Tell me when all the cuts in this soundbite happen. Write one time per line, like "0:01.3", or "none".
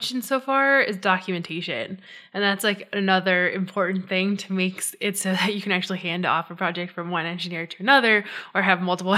none